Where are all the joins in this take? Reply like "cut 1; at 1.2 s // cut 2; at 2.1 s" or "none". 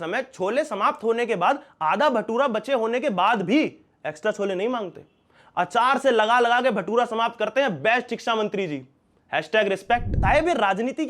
cut 1; at 10.1 s

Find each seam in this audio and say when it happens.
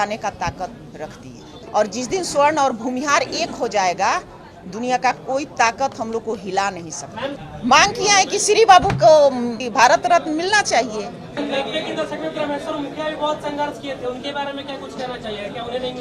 cut 1; at 1.5 s // cut 2; at 7.4 s // cut 3; at 9.6 s // cut 4; at 11.4 s

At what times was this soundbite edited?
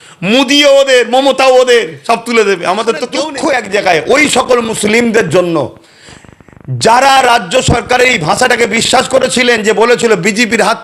cut 1; at 3.2 s

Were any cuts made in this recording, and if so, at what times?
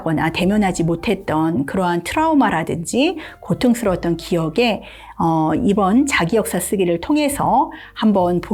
none

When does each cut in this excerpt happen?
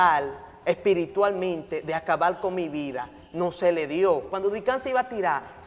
cut 1; at 4.3 s

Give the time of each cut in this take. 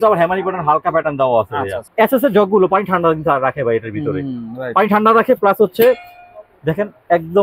cut 1; at 1.9 s

